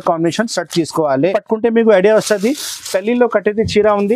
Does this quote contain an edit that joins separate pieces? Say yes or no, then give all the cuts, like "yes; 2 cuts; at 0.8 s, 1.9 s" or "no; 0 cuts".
yes; 1 cut; at 1.3 s